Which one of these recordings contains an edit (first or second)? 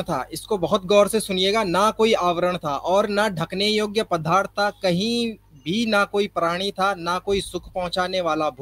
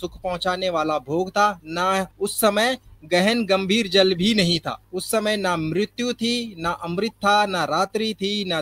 second